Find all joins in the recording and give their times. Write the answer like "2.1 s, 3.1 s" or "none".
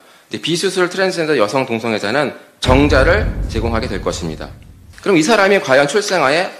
4.8 s